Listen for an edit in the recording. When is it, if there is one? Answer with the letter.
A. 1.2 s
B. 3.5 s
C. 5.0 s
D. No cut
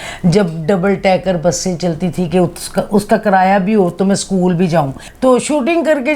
C